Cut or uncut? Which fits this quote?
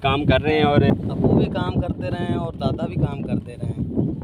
cut